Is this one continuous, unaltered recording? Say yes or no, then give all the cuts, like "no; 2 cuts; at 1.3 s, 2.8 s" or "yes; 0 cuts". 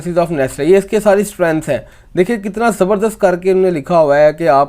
yes; 0 cuts